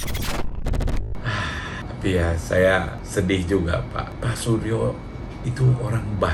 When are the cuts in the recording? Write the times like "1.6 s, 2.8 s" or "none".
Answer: none